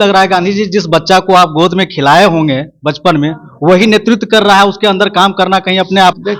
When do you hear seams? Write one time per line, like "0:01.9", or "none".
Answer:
none